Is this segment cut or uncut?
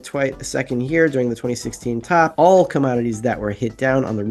cut